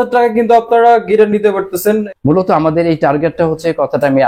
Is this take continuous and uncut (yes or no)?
no